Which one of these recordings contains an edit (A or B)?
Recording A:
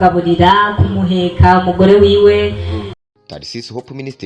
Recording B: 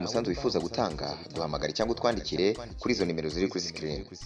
A